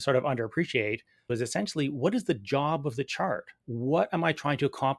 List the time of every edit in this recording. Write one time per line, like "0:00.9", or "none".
0:01.3
0:03.6